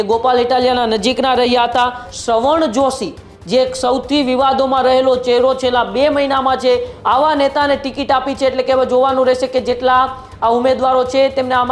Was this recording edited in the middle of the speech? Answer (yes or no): yes